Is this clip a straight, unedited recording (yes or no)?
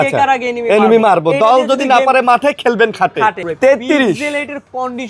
no